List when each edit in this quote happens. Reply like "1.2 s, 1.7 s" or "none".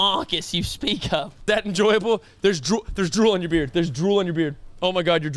1.4 s

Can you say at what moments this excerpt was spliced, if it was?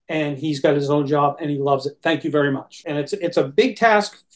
2.8 s

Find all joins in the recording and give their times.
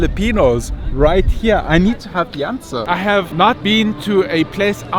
2.8 s

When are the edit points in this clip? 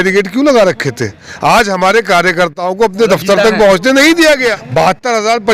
4.6 s

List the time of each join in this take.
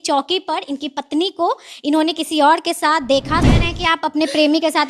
3.5 s

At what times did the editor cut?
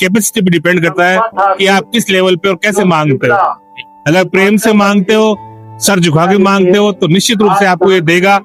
none

